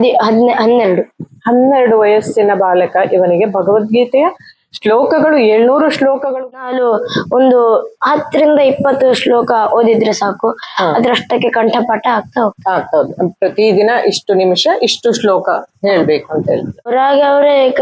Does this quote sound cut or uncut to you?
cut